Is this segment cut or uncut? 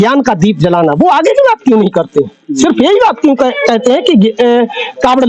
uncut